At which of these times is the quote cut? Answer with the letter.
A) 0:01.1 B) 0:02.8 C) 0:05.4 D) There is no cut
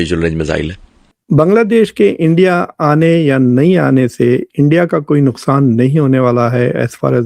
A